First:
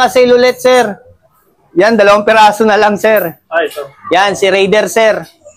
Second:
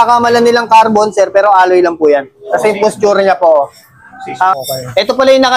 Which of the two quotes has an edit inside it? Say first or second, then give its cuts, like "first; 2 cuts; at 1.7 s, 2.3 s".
second; 1 cut; at 4.6 s